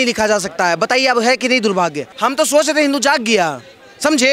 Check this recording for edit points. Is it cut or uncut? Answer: cut